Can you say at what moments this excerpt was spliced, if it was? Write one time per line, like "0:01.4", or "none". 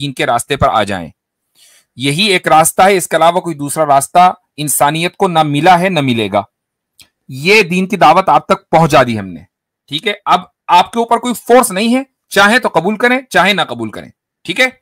none